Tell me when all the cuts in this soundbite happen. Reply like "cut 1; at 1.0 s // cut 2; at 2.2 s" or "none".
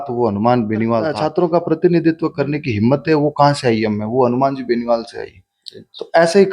cut 1; at 1.2 s